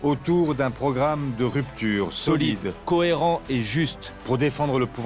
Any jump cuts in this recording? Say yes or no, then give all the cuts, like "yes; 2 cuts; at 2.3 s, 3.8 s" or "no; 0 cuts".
yes; 1 cut; at 2.7 s